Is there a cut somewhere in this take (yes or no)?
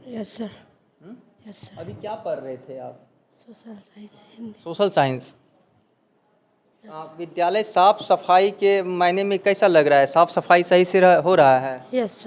no